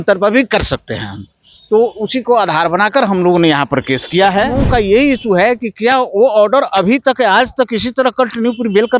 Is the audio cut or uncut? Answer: cut